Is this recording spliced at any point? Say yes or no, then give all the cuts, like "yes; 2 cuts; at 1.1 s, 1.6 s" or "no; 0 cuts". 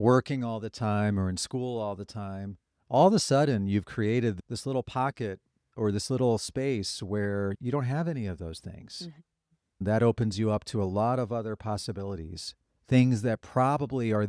yes; 2 cuts; at 4.4 s, 9.8 s